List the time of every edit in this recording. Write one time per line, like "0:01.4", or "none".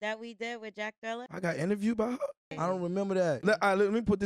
0:01.3
0:02.5
0:03.4